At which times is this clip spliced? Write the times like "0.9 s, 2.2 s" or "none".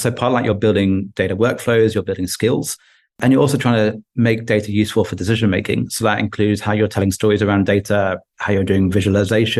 none